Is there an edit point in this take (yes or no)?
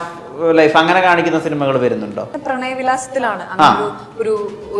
yes